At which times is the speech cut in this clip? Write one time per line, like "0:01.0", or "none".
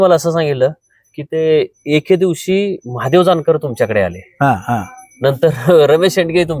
none